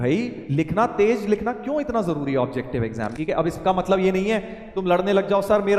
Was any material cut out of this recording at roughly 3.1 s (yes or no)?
yes